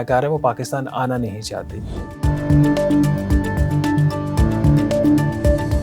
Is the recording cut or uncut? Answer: uncut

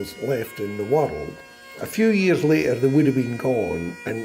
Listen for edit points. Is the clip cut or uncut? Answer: cut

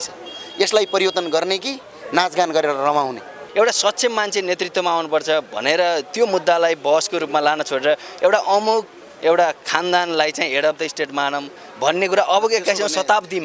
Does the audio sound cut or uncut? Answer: cut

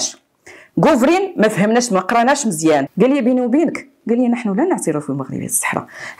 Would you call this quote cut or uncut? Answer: cut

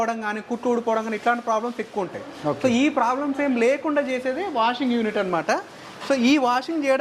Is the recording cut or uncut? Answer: uncut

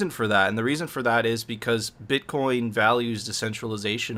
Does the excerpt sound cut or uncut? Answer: uncut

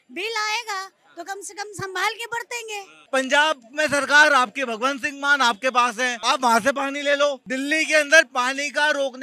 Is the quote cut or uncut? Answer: cut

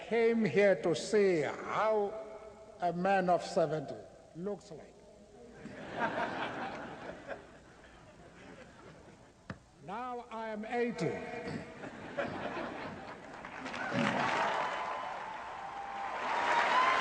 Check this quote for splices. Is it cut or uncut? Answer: uncut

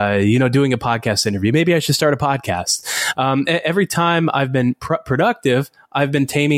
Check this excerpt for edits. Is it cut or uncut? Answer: uncut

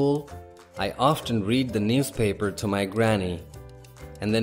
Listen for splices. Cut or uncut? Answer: uncut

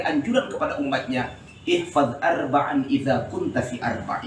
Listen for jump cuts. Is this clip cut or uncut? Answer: uncut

